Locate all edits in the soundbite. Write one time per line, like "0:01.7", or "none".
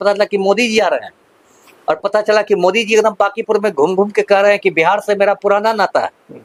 none

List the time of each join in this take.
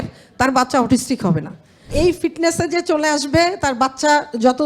0:01.9

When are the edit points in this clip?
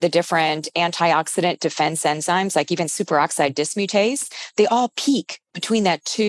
none

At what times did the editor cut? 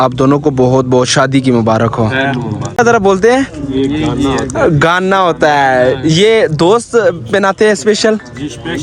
0:02.8

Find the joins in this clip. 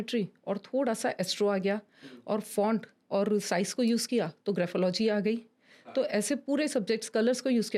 none

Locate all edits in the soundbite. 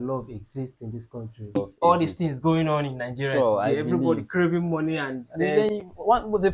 0:01.6

